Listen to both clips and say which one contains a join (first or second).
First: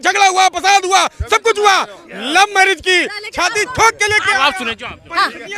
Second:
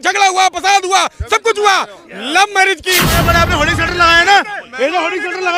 second